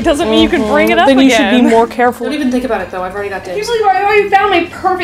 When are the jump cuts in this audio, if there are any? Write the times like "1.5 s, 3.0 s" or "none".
1.1 s, 2.2 s, 3.6 s

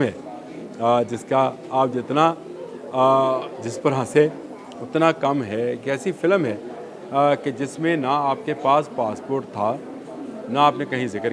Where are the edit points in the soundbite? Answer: none

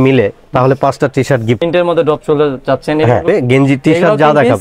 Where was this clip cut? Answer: 1.6 s, 3.2 s

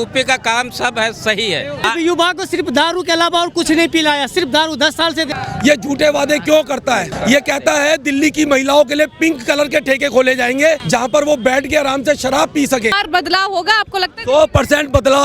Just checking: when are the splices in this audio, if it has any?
1.8 s, 5.3 s, 7.1 s, 10.8 s, 13.0 s

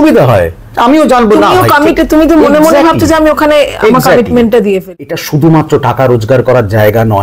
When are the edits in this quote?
4.8 s

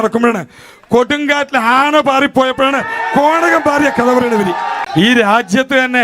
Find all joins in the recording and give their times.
4.8 s

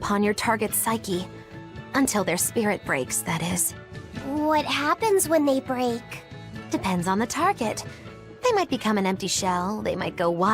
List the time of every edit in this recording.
7.3 s

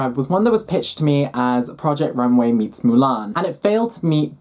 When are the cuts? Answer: none

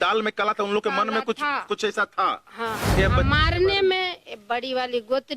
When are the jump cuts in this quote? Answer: 2.9 s

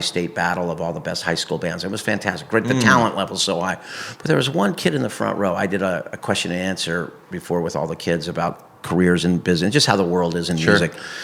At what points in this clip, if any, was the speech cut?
none

